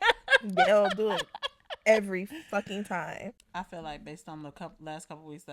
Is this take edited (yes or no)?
yes